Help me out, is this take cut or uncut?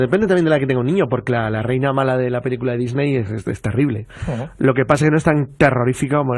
uncut